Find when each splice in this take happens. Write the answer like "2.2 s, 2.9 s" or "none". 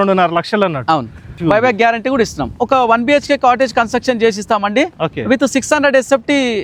1.4 s, 2.6 s